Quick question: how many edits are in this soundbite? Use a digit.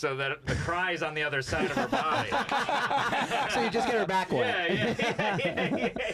0